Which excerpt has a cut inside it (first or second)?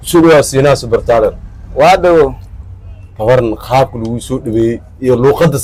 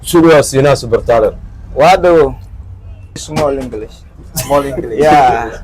second